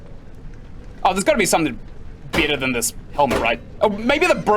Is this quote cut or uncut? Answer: cut